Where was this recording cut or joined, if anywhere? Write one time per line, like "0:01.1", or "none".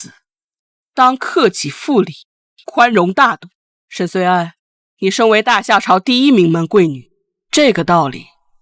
none